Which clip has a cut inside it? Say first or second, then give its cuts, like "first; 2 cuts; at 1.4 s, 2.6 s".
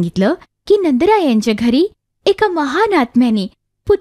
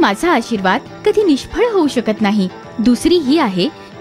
second; 1 cut; at 2.6 s